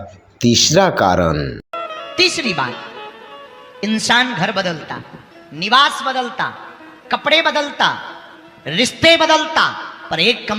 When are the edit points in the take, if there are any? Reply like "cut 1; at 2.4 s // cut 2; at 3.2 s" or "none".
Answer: none